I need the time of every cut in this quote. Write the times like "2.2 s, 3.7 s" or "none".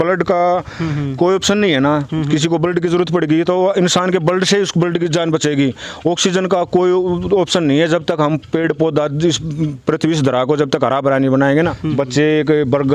11.8 s